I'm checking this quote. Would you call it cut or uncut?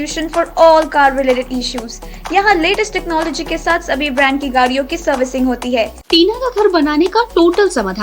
cut